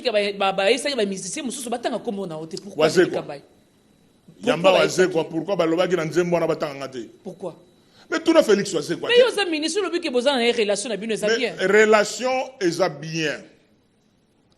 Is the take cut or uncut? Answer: uncut